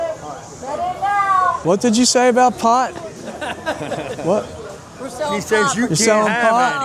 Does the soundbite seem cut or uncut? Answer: cut